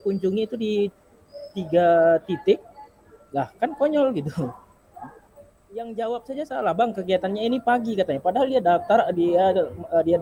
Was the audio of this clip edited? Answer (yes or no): no